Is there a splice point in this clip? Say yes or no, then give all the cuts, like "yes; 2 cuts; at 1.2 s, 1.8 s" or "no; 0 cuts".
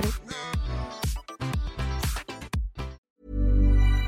yes; 1 cut; at 3.0 s